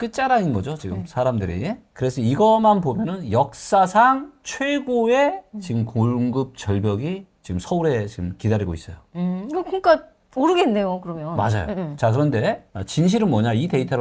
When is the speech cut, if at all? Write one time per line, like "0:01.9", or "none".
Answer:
0:01.9